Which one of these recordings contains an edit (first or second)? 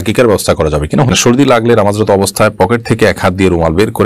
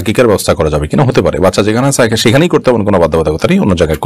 first